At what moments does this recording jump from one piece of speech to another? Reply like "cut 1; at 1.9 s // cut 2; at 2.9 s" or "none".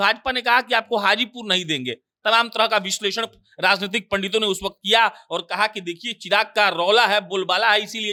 none